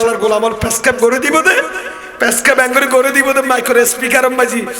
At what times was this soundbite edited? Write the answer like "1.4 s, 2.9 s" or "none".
none

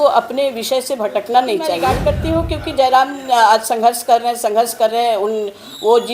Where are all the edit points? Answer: 1.9 s

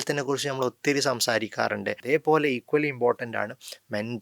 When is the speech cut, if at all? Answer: 2.0 s

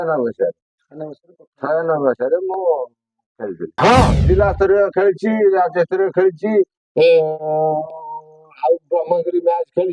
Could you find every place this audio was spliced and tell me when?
3.7 s

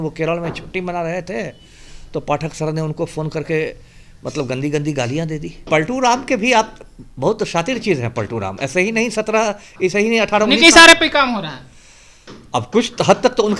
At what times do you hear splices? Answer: 5.6 s

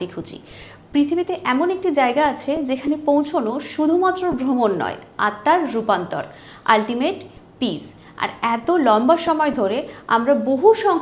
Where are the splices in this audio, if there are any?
none

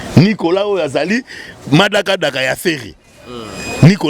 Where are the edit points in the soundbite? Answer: none

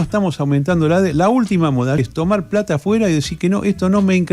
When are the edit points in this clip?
2.0 s

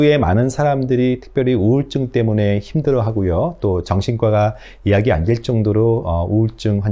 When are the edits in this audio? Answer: none

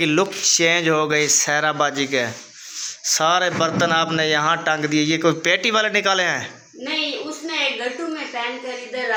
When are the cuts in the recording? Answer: none

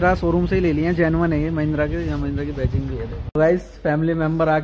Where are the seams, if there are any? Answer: 3.3 s

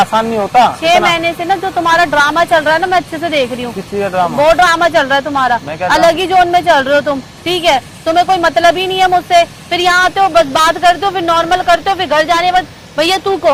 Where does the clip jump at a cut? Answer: none

